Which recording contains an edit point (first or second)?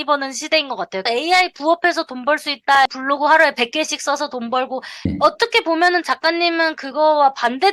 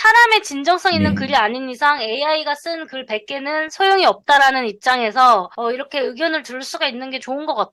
first